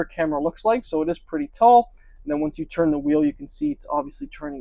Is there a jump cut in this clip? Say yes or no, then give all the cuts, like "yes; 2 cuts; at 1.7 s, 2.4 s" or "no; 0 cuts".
no; 0 cuts